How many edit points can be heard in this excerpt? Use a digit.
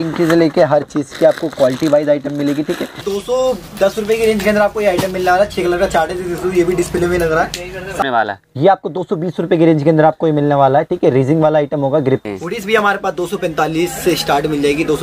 3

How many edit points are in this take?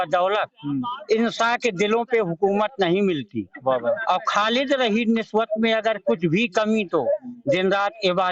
0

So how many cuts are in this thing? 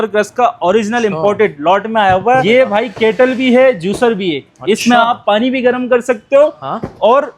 1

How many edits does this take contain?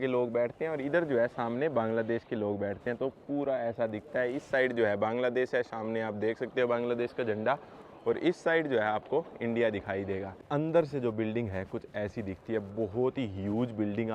1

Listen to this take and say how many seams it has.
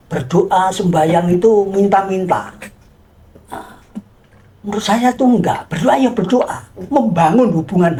0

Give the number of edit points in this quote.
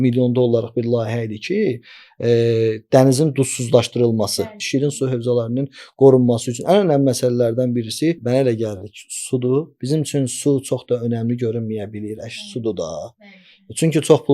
3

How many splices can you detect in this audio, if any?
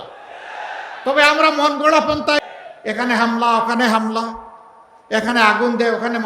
1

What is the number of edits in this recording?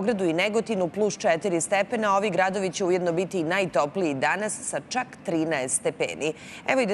1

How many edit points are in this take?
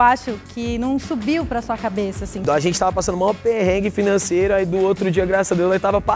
1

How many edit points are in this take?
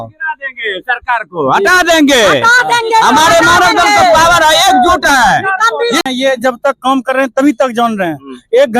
1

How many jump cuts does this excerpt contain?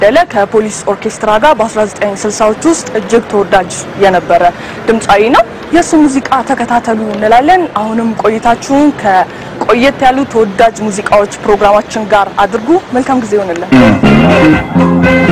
1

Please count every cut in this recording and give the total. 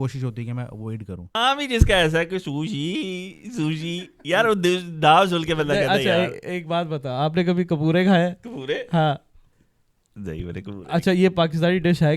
1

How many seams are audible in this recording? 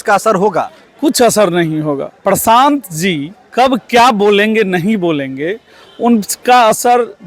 1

